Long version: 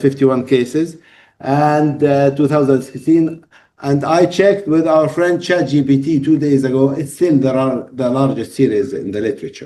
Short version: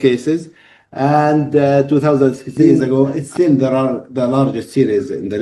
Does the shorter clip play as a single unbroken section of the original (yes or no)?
no